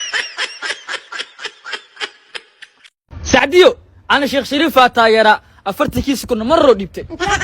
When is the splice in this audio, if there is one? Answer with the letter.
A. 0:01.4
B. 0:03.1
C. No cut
B